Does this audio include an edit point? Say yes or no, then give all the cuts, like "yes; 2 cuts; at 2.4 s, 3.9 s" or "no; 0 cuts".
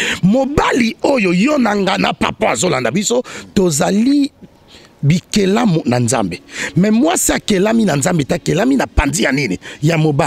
no; 0 cuts